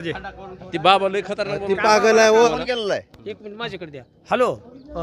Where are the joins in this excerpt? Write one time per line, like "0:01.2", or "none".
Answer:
0:02.5

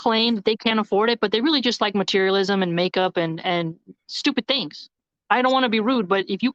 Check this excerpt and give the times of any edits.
none

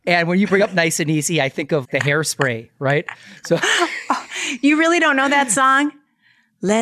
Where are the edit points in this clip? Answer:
0:03.6

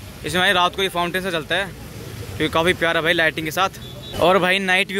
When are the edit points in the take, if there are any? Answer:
0:04.1

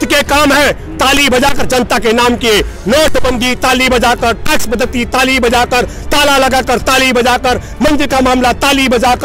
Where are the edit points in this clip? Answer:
none

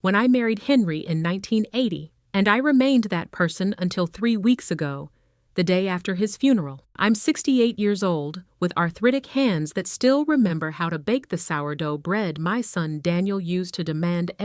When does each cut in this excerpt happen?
0:02.1
0:06.8

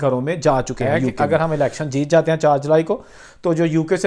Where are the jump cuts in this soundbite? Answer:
0:01.0

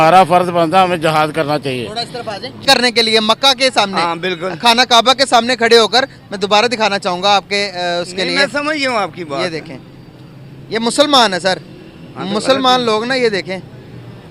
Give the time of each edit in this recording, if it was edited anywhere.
0:02.6

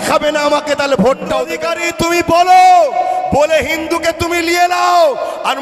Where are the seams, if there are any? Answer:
0:01.5

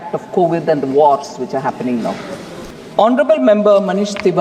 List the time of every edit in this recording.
0:02.6

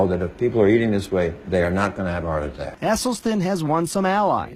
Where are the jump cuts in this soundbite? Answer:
none

